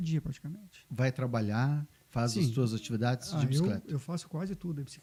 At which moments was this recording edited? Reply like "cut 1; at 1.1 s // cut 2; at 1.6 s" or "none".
none